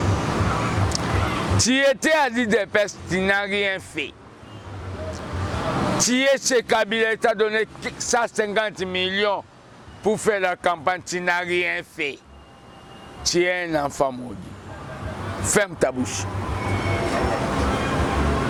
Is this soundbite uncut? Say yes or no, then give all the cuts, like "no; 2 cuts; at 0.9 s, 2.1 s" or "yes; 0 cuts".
yes; 0 cuts